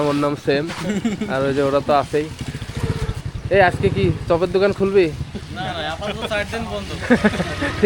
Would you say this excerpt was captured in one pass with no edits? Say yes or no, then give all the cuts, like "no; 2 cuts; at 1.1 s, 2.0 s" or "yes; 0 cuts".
yes; 0 cuts